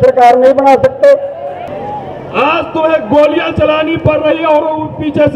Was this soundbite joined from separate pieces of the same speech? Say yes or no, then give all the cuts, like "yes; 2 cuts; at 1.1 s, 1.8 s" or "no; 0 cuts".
yes; 1 cut; at 1.7 s